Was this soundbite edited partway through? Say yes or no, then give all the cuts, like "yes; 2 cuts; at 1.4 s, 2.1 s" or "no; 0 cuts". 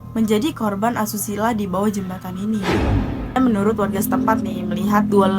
yes; 1 cut; at 3.4 s